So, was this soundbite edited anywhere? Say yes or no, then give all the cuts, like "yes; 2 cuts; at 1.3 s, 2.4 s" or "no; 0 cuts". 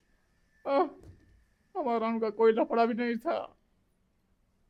no; 0 cuts